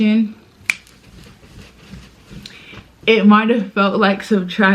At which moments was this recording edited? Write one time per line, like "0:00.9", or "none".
none